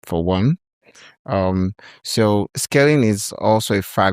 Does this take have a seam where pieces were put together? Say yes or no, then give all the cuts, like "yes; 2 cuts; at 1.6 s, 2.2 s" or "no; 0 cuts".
yes; 1 cut; at 2.6 s